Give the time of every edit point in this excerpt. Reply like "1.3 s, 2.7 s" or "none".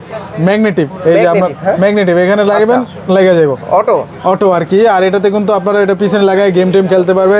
none